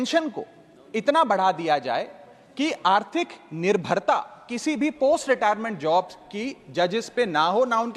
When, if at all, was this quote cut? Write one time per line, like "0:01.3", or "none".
none